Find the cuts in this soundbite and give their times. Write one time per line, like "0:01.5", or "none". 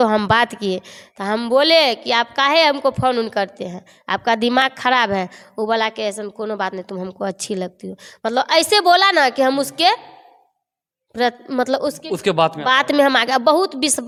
none